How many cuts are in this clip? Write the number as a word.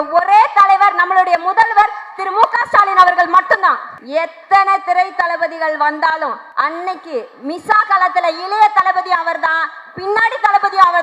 two